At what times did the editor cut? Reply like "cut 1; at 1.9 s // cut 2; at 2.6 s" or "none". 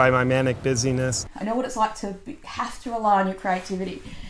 cut 1; at 1.3 s